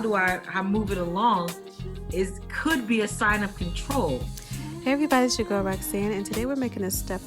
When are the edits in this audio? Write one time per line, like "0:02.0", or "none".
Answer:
0:04.7